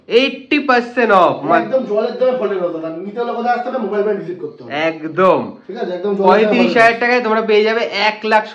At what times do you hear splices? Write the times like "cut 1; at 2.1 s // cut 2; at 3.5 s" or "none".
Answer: none